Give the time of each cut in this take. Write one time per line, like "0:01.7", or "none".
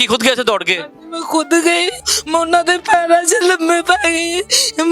0:02.1